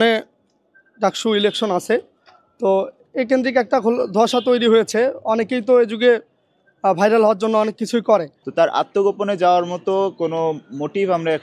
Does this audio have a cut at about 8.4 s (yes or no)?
yes